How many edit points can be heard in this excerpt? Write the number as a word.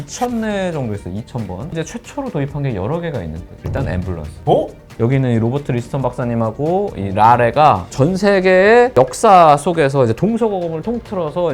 two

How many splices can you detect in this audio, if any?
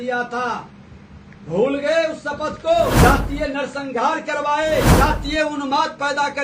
two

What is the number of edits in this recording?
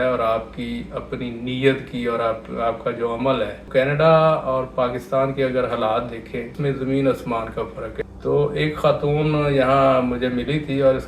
three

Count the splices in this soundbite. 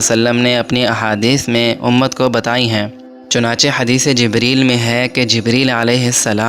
zero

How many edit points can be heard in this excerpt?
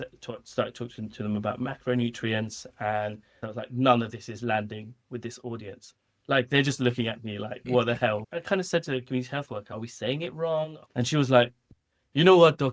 four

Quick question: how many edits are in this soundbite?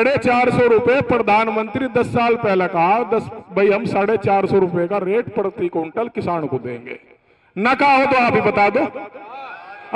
zero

